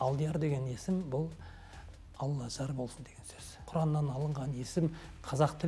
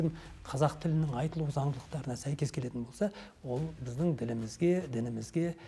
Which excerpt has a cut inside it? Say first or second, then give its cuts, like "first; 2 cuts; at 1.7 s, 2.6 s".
first; 1 cut; at 3.6 s